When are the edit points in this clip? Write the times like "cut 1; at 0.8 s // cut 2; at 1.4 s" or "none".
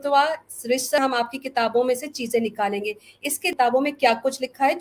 cut 1; at 1.0 s // cut 2; at 3.4 s